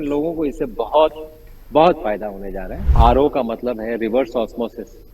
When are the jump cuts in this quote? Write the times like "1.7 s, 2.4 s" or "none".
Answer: 2.9 s